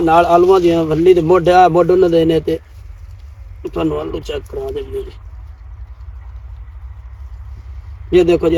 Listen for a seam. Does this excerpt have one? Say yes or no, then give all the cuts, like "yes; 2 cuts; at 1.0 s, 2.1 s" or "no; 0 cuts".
no; 0 cuts